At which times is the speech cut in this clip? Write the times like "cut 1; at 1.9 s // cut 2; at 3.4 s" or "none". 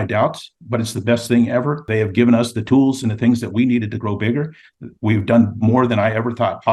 cut 1; at 1.8 s